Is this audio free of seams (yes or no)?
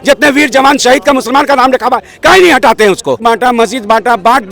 no